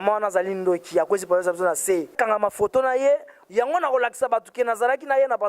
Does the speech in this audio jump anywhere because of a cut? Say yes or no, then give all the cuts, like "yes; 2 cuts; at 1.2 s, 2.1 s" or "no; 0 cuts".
yes; 1 cut; at 2.2 s